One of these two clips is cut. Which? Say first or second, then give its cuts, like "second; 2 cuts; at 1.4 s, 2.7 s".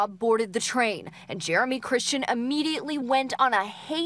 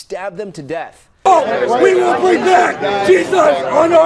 second; 1 cut; at 1.0 s